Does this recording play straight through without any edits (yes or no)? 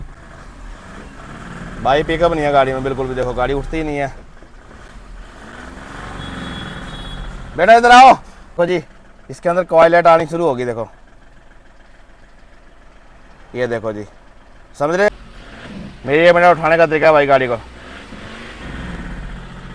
no